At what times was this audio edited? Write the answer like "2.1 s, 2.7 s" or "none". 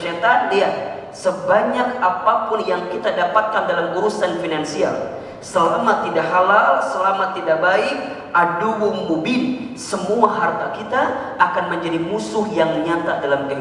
none